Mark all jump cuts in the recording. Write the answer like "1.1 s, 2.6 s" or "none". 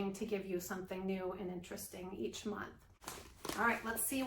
3.1 s